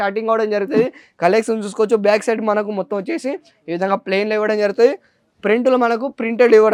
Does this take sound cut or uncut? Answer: uncut